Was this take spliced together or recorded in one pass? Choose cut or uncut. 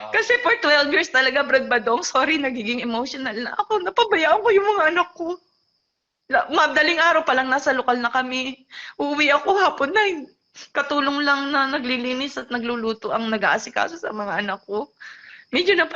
uncut